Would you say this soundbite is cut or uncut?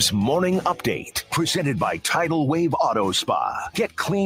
cut